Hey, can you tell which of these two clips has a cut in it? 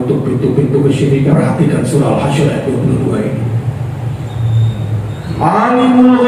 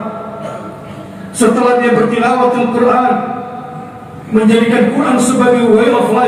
first; 1 cut; at 1.3 s

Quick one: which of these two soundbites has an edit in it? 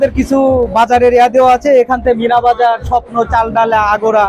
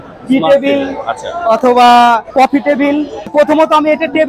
second; 2 cuts; at 2.3 s, 3.3 s

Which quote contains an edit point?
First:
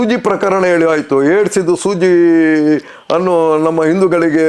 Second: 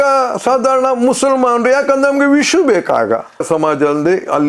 second; 1 cut; at 3.4 s

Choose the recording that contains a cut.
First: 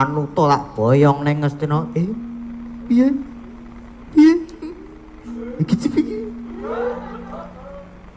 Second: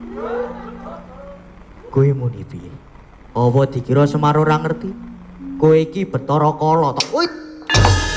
first; 1 cut; at 5.5 s

